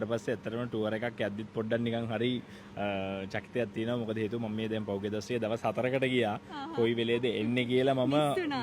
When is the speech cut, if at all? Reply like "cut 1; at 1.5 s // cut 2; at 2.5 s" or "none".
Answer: none